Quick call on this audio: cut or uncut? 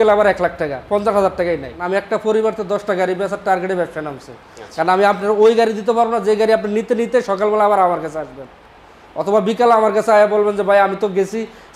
cut